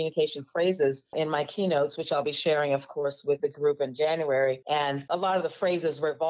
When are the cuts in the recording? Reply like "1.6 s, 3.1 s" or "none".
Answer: none